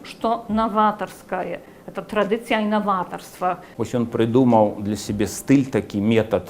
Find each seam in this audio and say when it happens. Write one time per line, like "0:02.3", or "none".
0:03.7

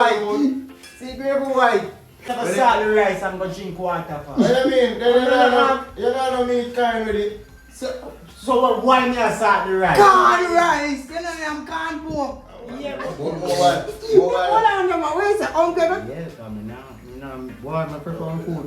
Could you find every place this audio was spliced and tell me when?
0:02.3
0:13.1

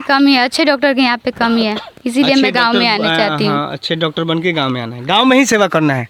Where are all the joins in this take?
none

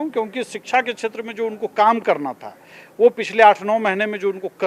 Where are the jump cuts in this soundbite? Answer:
none

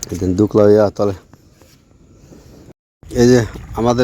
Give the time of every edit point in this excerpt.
0:02.7

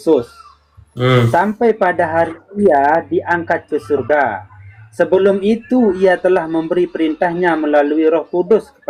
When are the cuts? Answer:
none

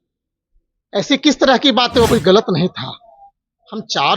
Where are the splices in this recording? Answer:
0:02.1

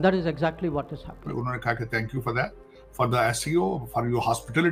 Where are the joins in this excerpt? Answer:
0:01.2

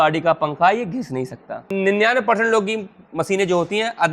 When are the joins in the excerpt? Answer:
0:01.7

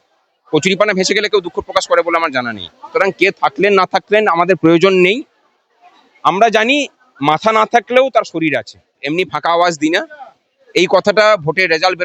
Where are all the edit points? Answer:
0:09.0

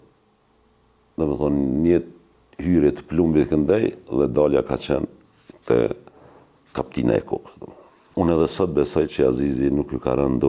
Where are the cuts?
none

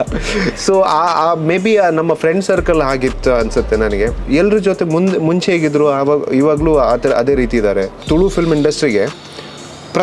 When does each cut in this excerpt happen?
0:04.2
0:08.0

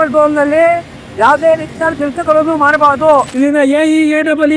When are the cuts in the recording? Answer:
0:03.3

